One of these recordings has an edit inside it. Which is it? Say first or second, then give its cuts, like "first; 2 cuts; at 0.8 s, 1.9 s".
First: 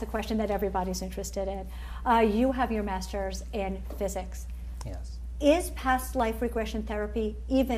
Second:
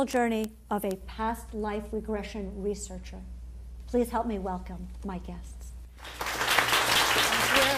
second; 1 cut; at 4.7 s